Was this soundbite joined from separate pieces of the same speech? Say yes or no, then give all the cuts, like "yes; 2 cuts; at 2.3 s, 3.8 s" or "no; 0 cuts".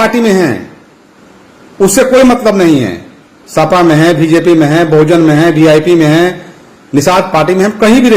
no; 0 cuts